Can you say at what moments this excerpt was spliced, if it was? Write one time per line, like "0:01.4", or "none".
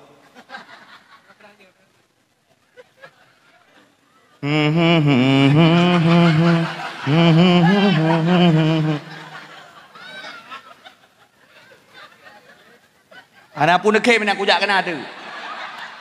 0:03.6